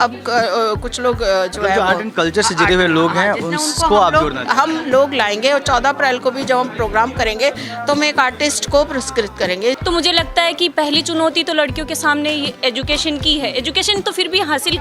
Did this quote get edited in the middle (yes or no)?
yes